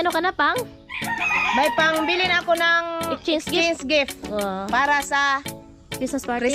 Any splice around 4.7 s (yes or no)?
no